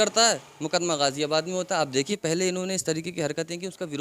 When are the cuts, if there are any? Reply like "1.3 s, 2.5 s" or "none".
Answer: 2.1 s